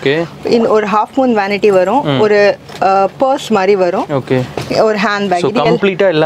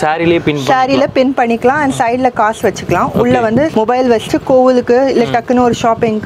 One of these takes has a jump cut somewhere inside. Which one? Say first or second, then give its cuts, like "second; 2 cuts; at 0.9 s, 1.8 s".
second; 1 cut; at 3.7 s